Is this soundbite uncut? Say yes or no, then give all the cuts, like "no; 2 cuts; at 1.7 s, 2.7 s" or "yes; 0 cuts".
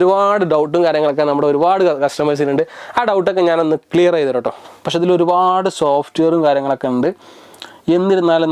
yes; 0 cuts